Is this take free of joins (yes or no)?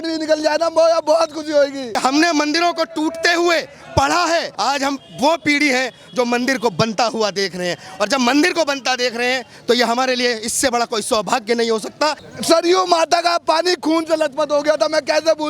no